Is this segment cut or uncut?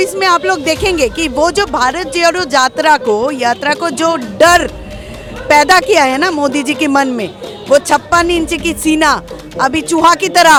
uncut